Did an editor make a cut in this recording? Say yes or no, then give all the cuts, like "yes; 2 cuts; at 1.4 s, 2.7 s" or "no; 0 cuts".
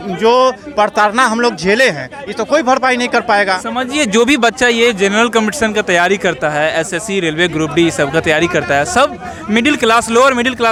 no; 0 cuts